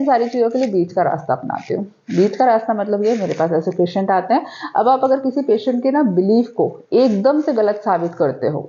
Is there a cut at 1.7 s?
no; 0 cuts

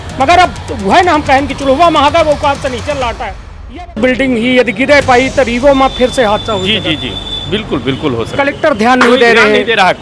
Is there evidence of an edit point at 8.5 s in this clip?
no; 1 cut; at 3.9 s

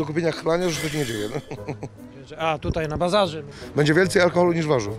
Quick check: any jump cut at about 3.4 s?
yes; 1 cut; at 3.4 s

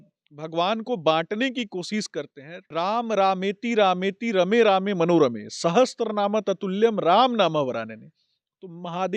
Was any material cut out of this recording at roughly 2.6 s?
yes; 1 cut; at 2.6 s

